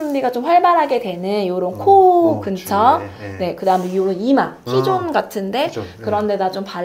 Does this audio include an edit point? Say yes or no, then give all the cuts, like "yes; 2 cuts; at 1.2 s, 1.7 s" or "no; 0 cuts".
no; 0 cuts